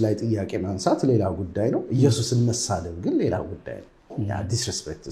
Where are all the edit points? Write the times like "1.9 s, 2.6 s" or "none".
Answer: none